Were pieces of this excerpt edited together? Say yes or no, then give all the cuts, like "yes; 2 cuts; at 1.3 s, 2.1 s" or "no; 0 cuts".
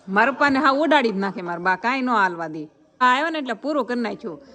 yes; 1 cut; at 3.0 s